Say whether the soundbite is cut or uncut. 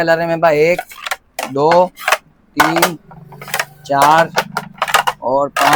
uncut